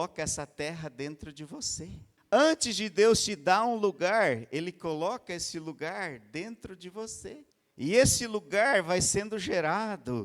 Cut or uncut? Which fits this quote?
cut